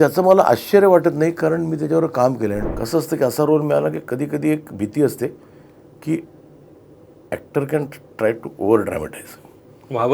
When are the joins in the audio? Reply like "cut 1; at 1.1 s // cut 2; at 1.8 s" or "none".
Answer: cut 1; at 2.6 s